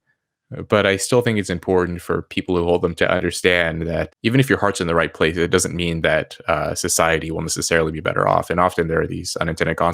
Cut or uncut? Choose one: cut